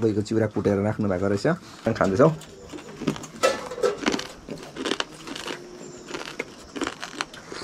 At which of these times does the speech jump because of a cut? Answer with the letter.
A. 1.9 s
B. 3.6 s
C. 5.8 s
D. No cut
A